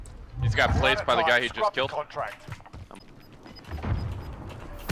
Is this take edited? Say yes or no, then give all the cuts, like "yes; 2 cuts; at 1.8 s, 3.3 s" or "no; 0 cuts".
yes; 1 cut; at 2.8 s